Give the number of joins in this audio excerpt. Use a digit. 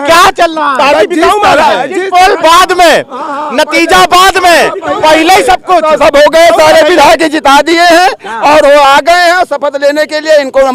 0